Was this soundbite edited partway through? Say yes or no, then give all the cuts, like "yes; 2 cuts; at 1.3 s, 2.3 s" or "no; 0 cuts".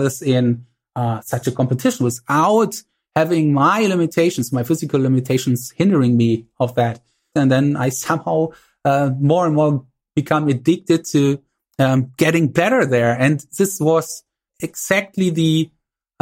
yes; 2 cuts; at 7.3 s, 14.4 s